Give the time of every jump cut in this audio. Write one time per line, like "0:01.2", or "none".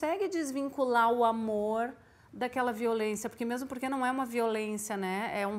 none